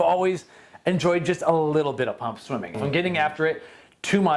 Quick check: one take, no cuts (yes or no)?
no